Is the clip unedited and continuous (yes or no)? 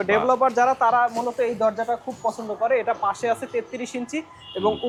yes